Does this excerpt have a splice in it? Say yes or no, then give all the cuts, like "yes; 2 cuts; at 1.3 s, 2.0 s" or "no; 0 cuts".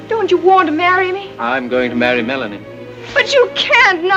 no; 0 cuts